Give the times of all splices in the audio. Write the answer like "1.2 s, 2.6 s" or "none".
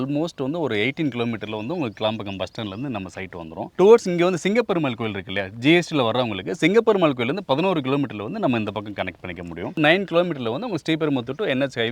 3.6 s, 9.8 s